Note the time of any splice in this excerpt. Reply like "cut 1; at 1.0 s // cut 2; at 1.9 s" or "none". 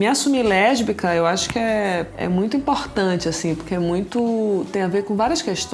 cut 1; at 2.1 s